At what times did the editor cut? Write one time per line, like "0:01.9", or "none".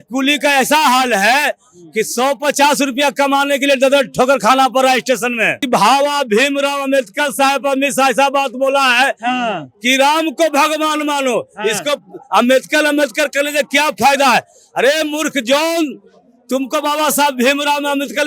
0:05.6